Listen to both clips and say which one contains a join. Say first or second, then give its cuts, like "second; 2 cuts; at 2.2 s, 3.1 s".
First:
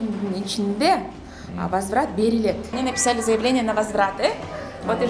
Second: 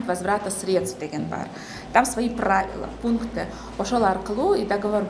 first; 1 cut; at 2.7 s